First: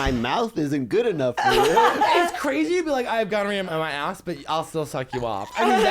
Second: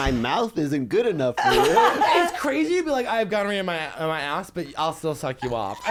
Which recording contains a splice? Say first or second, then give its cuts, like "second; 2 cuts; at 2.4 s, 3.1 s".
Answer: first; 1 cut; at 3.7 s